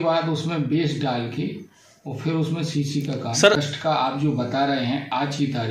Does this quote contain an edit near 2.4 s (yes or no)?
no